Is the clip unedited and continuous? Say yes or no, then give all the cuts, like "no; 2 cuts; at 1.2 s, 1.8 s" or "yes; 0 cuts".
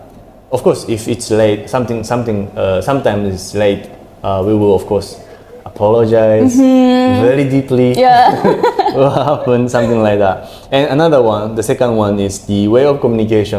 yes; 0 cuts